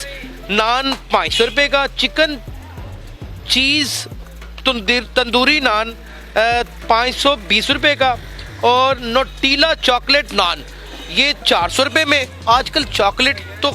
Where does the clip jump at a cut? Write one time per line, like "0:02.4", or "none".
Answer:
none